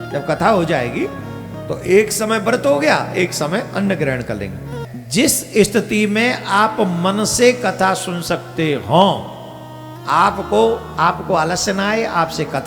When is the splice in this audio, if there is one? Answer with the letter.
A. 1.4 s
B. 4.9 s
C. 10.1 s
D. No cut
B